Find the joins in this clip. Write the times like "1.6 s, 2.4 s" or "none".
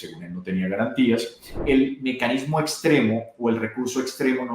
1.5 s